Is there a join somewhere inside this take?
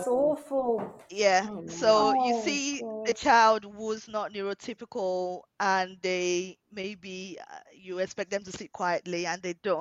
no; 0 cuts

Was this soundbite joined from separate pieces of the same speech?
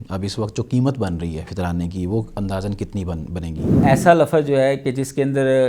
yes; 2 cuts; at 1.5 s, 3.8 s

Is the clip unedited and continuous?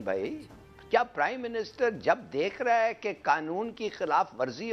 yes; 0 cuts

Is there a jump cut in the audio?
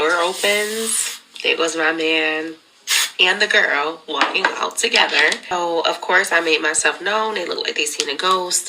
yes; 1 cut; at 5.5 s

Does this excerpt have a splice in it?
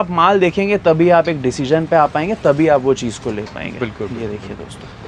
no; 0 cuts

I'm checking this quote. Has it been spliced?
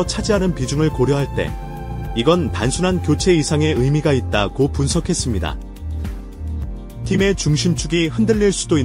yes; 2 cuts; at 5.6 s, 7.1 s

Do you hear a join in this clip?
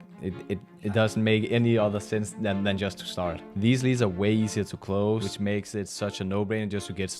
yes; 2 cuts; at 3.4 s, 5.3 s

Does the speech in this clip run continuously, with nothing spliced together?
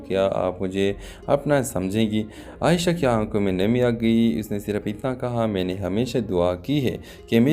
no; 1 cut; at 3.4 s

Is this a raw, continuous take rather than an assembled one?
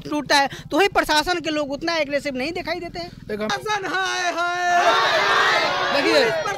no; 1 cut; at 3.5 s

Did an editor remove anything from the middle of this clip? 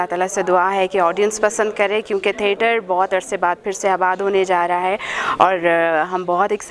no; 0 cuts

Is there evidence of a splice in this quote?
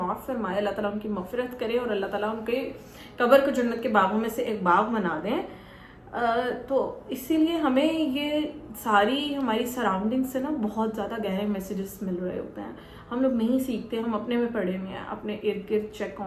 no; 0 cuts

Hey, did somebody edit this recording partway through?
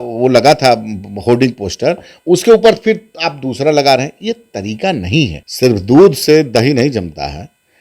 yes; 1 cut; at 5.4 s

